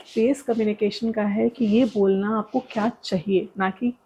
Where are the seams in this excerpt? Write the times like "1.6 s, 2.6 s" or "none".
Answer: none